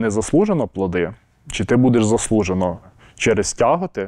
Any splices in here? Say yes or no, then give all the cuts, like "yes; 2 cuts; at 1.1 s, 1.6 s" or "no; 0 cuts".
yes; 1 cut; at 3.0 s